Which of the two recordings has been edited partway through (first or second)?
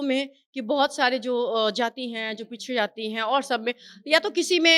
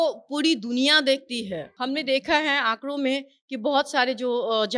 second